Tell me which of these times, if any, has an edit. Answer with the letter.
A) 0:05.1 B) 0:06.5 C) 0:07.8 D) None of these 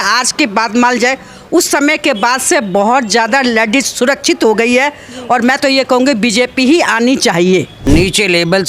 C